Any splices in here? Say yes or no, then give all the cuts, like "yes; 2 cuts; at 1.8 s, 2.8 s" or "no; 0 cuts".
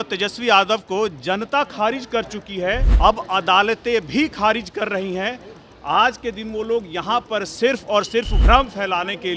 yes; 2 cuts; at 2.9 s, 8.3 s